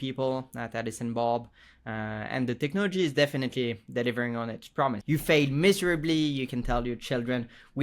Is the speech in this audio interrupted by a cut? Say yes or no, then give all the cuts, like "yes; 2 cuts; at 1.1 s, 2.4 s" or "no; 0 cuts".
yes; 1 cut; at 5.0 s